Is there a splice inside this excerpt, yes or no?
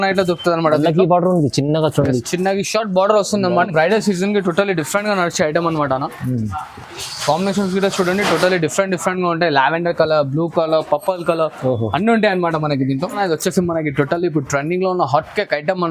yes